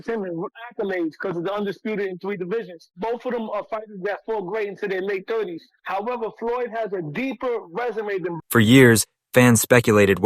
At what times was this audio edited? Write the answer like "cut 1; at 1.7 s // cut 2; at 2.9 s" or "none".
cut 1; at 8.4 s